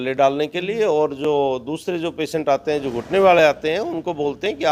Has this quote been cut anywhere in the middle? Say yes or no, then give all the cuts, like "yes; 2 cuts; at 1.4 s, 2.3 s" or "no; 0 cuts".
no; 0 cuts